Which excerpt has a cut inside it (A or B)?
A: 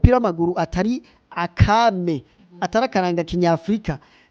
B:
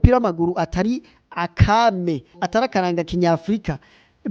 B